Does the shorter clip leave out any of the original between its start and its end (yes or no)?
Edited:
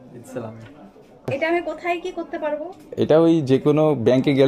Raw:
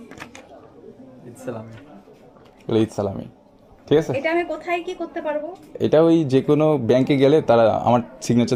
yes